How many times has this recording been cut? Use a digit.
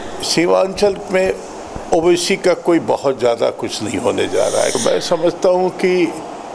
1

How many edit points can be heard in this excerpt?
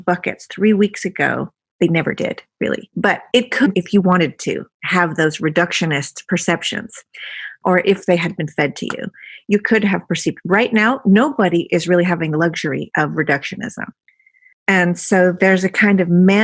2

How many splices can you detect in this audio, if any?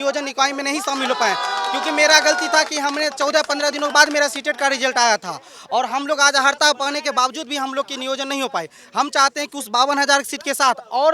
0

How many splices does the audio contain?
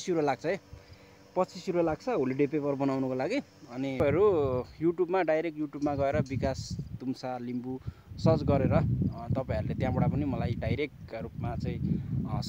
1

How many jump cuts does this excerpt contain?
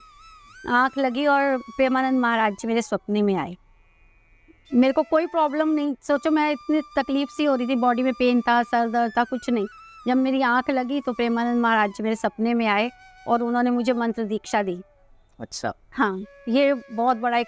0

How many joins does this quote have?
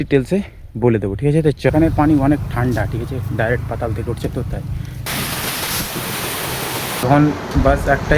3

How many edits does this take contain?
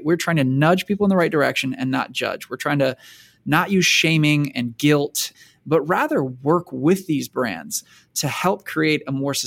2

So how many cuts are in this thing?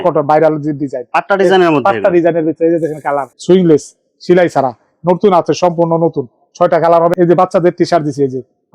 2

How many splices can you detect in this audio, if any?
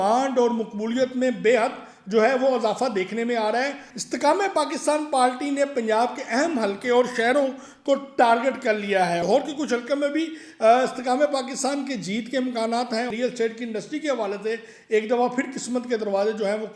3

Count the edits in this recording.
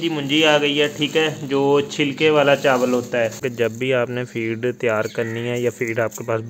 1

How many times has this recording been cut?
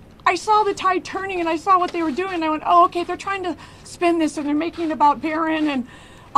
1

